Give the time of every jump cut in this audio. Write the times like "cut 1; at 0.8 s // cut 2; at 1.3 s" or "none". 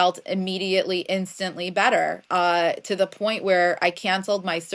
none